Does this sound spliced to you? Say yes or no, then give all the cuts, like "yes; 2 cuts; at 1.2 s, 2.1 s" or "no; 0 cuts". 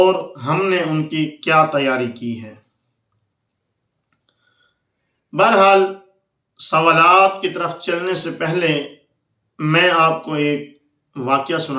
no; 0 cuts